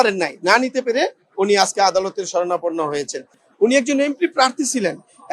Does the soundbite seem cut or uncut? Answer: cut